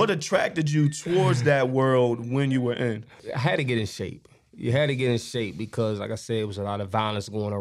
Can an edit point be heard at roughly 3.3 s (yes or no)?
yes